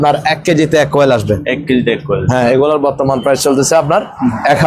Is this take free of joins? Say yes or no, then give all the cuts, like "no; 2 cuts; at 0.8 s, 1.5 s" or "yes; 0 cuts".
yes; 0 cuts